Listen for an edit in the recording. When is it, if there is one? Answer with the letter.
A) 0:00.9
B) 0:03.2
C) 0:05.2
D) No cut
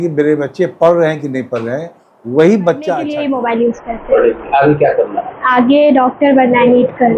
B